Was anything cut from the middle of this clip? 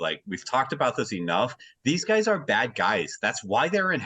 no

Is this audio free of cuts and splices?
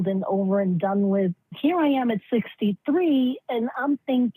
no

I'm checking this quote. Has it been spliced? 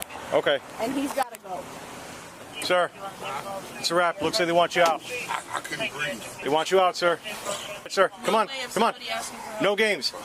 yes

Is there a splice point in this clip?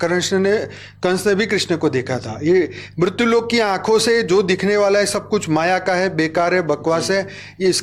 no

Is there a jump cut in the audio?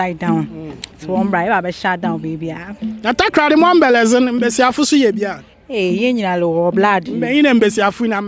no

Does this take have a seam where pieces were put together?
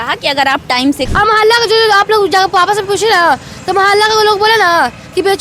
yes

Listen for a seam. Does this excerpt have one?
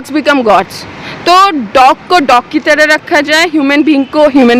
no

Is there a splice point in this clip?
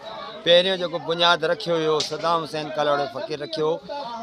no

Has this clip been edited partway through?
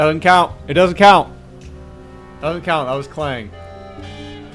yes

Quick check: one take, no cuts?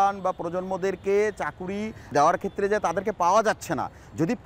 no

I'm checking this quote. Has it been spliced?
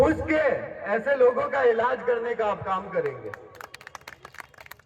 no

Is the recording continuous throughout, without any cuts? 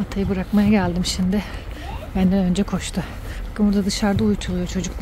yes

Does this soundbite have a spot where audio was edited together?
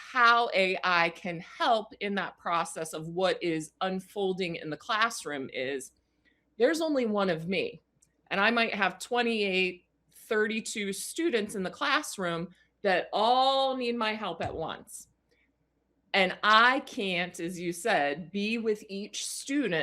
no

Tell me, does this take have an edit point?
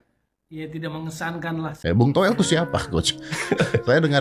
yes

